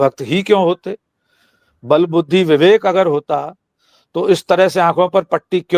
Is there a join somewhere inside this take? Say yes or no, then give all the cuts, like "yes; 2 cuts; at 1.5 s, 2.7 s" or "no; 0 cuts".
no; 0 cuts